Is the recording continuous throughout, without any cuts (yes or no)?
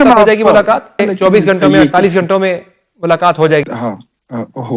no